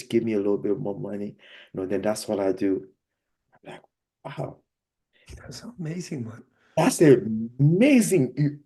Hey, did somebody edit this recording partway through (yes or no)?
no